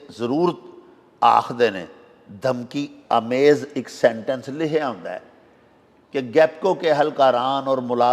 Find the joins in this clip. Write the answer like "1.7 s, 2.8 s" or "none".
none